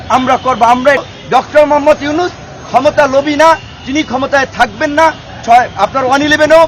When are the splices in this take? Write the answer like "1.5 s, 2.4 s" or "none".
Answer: 1.1 s